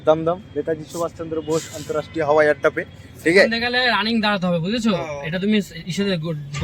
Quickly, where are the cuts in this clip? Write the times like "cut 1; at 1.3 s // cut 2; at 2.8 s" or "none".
cut 1; at 3.6 s